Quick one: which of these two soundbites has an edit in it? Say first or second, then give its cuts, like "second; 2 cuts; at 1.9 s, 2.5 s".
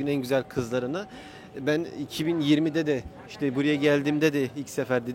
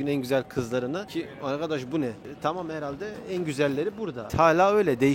second; 2 cuts; at 1.1 s, 4.2 s